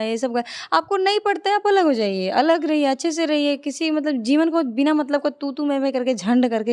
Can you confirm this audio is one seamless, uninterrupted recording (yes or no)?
yes